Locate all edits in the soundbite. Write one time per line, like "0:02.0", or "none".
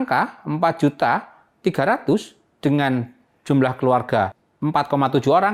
0:04.5